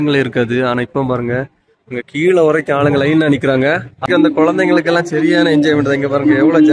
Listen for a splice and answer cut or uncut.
cut